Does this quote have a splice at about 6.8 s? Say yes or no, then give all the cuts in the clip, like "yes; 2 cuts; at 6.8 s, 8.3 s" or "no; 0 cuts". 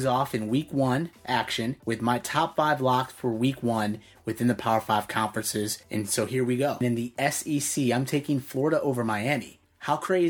yes; 2 cuts; at 1.8 s, 6.8 s